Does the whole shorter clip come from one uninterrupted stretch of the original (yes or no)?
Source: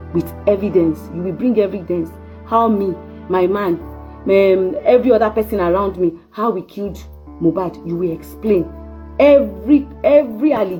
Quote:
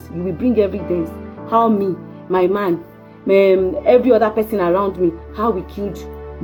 yes